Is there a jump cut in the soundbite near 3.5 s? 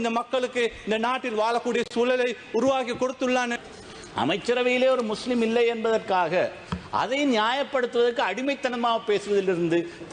yes; 1 cut; at 3.5 s

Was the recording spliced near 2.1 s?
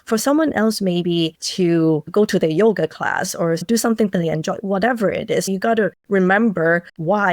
yes; 3 cuts; at 2.1 s, 3.6 s, 5.5 s

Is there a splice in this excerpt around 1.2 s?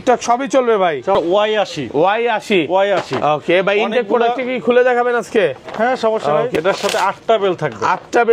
yes; 2 cuts; at 1.2 s, 6.5 s

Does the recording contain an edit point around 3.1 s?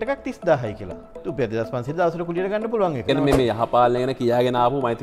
yes; 2 cuts; at 1.2 s, 3.1 s

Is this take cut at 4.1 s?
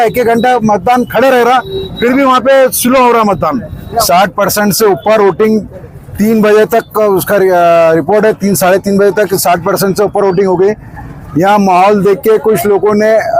yes; 1 cut; at 4.1 s

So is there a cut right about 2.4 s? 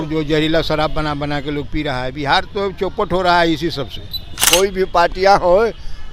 no; 1 cut; at 4.4 s

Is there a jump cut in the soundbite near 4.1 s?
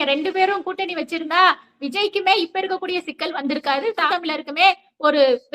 yes; 1 cut; at 4.1 s

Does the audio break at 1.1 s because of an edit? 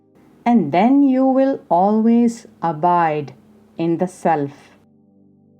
no; 1 cut; at 4.7 s

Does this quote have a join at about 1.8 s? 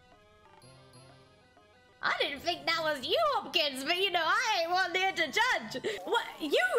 yes; 2 cuts; at 1.8 s, 6.0 s

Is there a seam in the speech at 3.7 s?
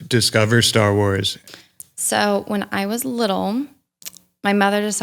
no; 1 cut; at 1.4 s

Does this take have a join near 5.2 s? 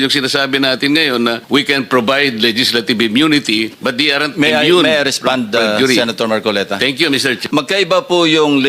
no; 3 cuts; at 1.4 s, 3.8 s, 7.4 s

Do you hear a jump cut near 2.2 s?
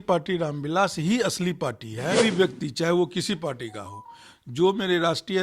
yes; 1 cut; at 2.2 s

